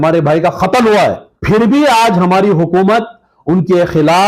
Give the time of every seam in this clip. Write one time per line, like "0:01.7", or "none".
0:01.3